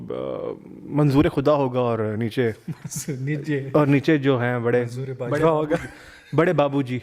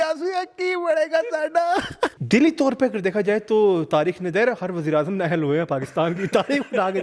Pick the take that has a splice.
second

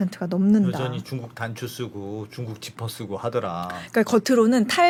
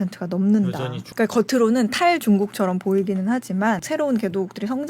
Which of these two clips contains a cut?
second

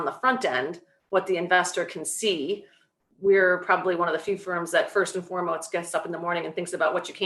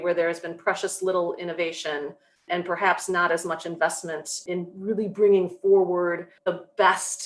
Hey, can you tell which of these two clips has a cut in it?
second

